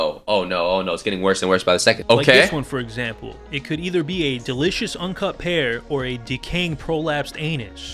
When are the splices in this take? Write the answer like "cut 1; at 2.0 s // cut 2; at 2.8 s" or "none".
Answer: cut 1; at 2.0 s